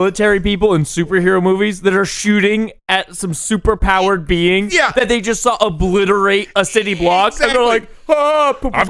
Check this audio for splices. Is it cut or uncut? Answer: uncut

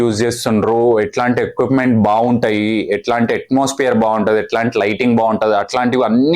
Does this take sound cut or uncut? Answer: uncut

